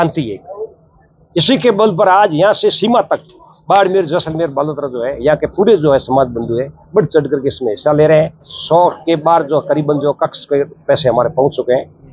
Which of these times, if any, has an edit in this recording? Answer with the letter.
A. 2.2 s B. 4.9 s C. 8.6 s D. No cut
C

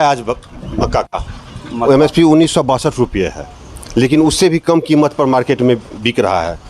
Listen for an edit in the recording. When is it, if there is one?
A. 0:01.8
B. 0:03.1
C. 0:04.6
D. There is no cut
A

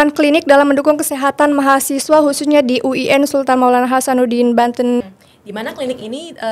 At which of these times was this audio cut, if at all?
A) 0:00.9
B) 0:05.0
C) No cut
B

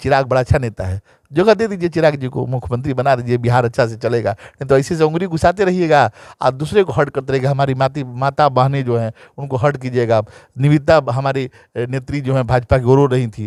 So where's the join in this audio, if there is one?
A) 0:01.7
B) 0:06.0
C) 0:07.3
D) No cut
D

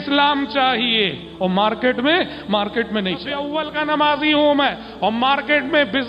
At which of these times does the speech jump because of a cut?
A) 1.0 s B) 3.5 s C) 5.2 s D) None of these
B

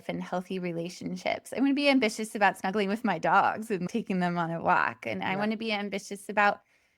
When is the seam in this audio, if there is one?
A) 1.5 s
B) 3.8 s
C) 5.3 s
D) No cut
B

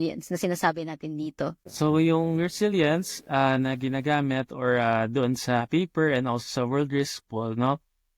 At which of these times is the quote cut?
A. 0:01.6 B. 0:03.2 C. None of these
A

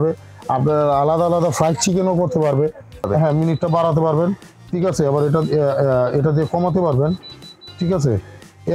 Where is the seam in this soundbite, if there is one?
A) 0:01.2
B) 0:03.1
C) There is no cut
B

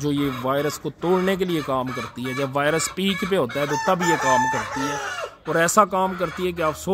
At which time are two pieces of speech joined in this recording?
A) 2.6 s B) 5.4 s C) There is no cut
C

